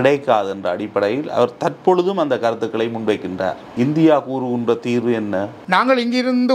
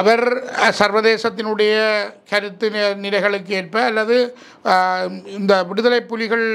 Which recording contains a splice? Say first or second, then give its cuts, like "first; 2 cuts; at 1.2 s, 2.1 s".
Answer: first; 2 cuts; at 3.6 s, 5.6 s